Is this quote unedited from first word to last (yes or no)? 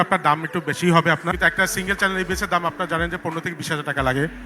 no